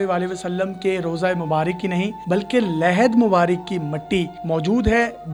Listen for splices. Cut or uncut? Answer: uncut